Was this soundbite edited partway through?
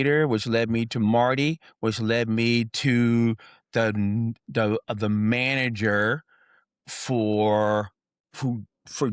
no; 0 cuts

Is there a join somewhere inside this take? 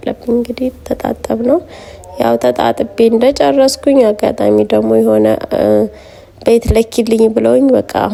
no; 0 cuts

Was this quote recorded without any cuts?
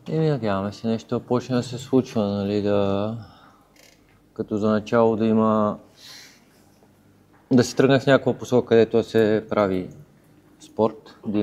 yes; 0 cuts

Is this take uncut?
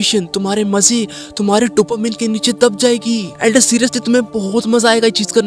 no; 1 cut; at 3.3 s

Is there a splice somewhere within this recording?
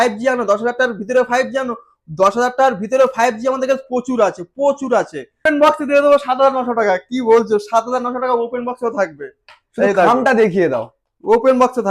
yes; 1 cut; at 5.4 s

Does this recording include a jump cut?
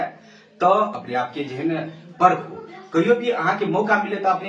yes; 1 cut; at 1.0 s

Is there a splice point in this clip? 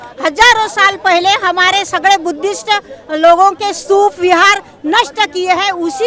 no; 0 cuts

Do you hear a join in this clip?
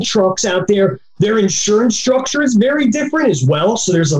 no; 0 cuts

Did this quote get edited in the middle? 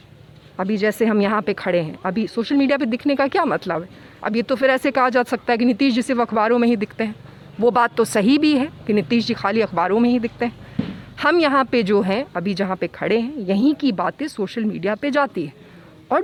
no; 0 cuts

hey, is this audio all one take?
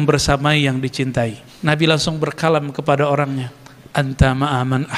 no; 1 cut; at 1.5 s

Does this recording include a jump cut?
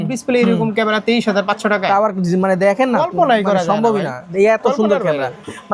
no; 0 cuts

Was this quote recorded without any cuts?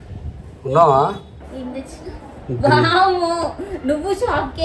no; 1 cut; at 1.4 s

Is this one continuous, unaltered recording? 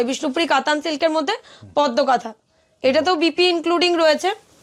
yes; 0 cuts

